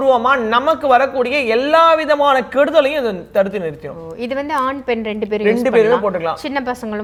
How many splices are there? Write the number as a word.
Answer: zero